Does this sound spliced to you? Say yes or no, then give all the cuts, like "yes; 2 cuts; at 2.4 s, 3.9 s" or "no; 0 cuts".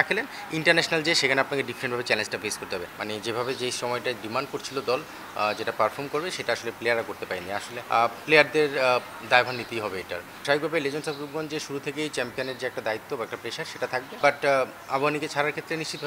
yes; 4 cuts; at 2.9 s, 7.8 s, 10.4 s, 14.2 s